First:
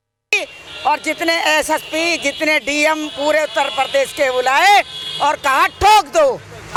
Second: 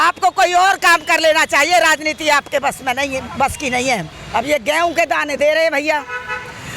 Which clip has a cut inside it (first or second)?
second